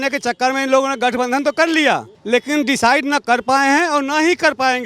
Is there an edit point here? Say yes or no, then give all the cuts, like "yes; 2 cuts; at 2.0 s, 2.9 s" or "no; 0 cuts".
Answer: yes; 1 cut; at 2.1 s